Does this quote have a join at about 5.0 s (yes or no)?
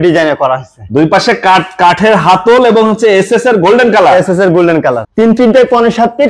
yes